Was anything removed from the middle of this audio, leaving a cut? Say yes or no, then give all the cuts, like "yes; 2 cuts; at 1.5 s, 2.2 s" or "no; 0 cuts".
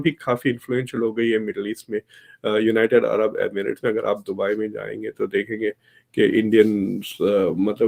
no; 0 cuts